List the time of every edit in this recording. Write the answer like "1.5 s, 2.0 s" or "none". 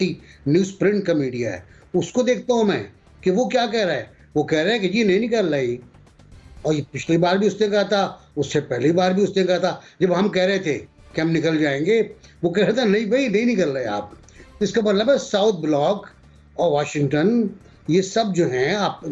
none